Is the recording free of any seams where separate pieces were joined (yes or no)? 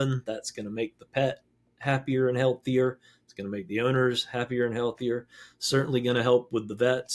yes